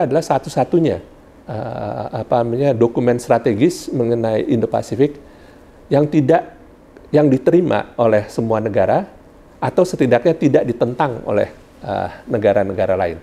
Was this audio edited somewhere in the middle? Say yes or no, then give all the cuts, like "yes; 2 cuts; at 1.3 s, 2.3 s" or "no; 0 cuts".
no; 0 cuts